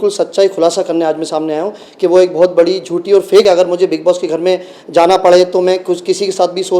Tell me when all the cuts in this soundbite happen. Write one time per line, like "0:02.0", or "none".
0:03.4